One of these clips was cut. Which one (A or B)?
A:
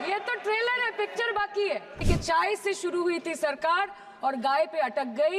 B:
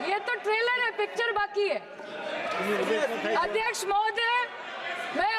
A